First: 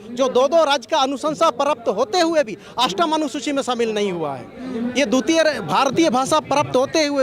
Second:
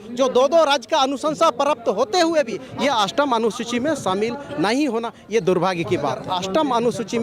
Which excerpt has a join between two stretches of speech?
second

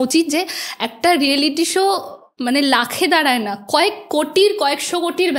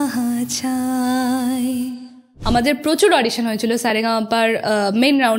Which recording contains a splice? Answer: second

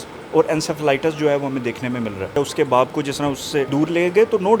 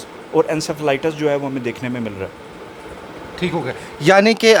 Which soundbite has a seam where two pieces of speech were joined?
first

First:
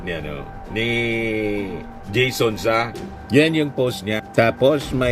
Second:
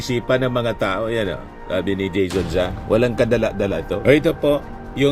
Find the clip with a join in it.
second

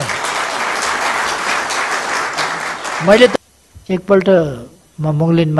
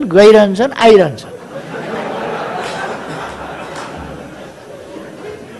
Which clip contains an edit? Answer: first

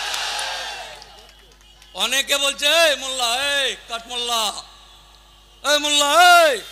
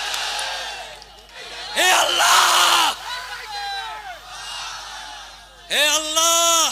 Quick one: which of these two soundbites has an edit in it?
second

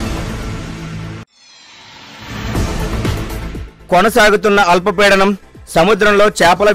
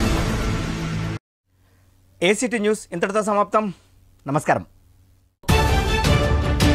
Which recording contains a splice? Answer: first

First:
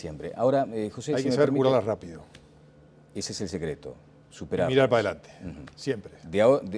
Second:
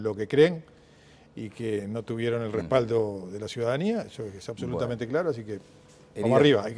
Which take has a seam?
first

